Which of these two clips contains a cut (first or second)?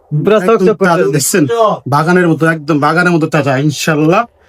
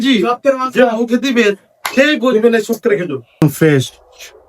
second